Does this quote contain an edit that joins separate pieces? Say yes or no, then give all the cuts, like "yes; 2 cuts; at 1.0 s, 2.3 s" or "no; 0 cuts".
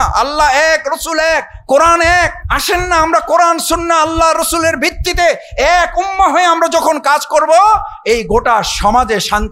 yes; 1 cut; at 2.5 s